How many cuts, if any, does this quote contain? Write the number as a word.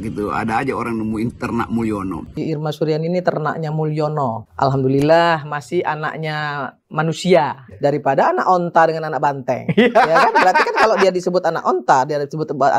one